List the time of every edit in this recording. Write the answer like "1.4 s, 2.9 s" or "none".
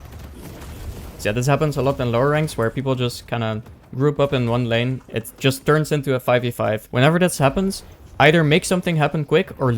1.2 s